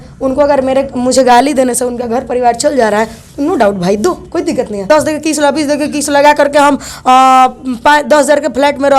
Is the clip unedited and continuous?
no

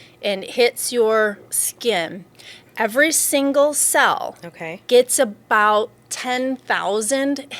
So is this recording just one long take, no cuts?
yes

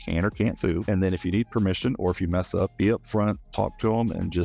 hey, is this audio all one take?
no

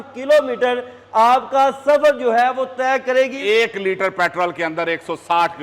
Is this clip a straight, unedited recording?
no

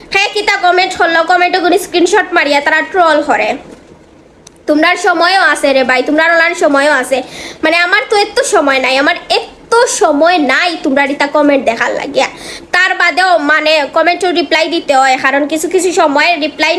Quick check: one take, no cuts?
yes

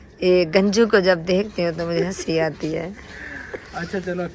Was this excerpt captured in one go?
yes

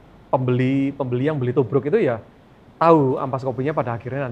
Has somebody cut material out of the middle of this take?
no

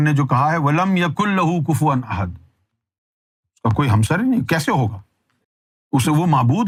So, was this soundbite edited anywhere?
no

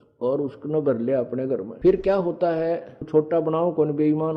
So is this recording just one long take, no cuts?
no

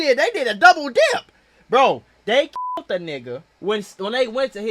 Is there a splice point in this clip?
yes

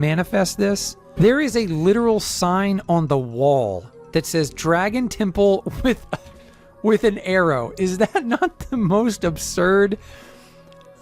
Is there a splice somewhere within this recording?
yes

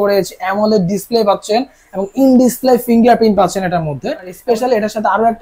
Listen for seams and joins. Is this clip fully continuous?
no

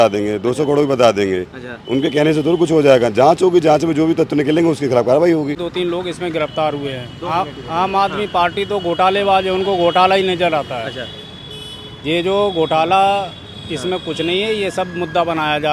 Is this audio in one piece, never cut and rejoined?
no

